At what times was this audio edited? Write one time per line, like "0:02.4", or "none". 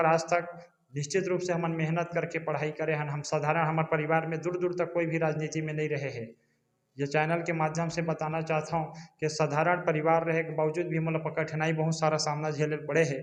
none